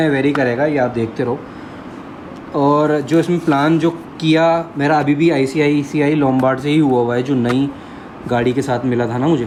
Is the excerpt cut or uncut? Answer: uncut